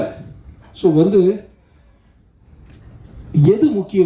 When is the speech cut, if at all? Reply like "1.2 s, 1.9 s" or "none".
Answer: none